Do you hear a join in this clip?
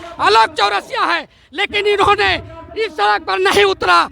no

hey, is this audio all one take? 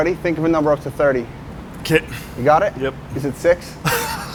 yes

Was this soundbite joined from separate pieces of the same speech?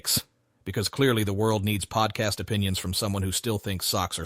no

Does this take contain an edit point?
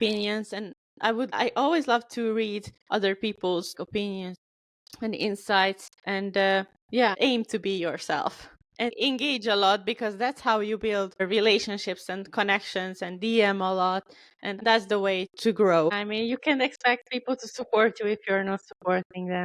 yes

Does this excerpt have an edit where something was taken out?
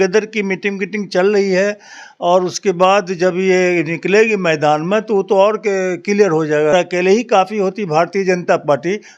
yes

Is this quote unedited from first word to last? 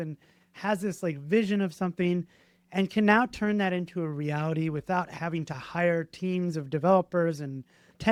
yes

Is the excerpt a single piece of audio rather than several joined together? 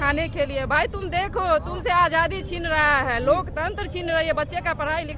yes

